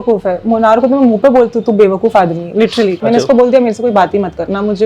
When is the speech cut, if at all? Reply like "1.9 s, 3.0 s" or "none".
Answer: 3.0 s